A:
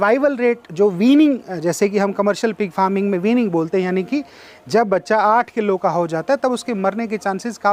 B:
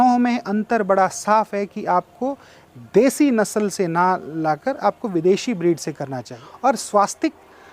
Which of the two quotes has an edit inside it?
B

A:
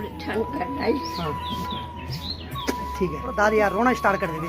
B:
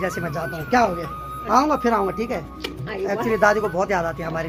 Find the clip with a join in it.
A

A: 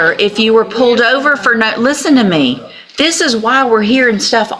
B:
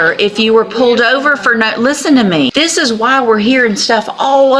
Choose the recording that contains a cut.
B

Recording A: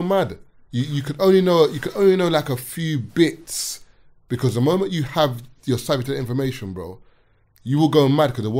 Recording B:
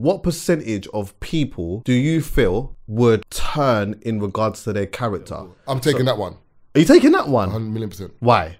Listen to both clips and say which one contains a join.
B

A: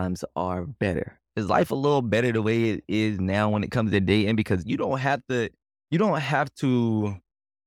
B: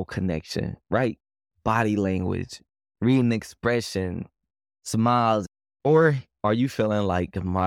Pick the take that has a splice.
B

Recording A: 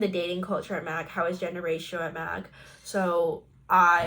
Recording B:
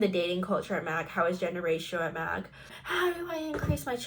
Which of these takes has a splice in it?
B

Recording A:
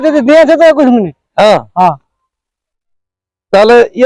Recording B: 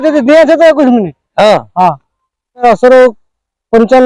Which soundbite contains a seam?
B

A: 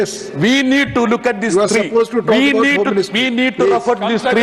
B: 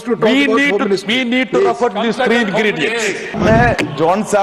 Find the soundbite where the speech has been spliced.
B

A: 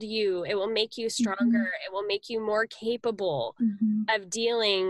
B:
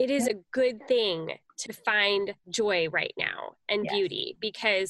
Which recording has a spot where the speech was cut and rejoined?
B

